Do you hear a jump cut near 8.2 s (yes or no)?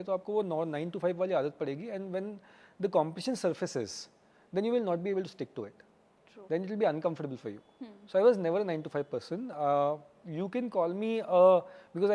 no